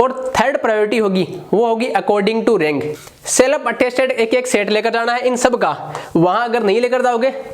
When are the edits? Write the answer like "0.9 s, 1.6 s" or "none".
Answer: 3.0 s